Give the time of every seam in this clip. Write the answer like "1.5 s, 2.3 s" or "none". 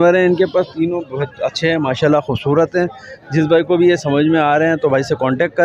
none